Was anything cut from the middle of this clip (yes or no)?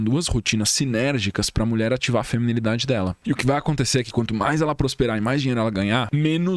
yes